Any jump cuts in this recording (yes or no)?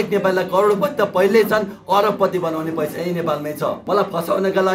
yes